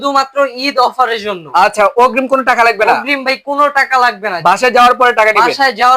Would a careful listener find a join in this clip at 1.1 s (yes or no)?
no